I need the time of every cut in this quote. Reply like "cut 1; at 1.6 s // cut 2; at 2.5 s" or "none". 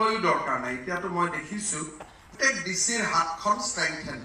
cut 1; at 2.3 s